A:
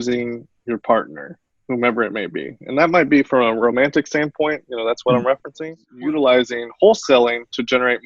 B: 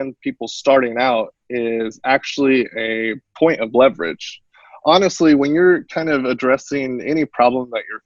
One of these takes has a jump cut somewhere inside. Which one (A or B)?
A